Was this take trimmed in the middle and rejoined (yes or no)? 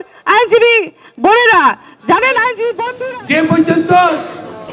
yes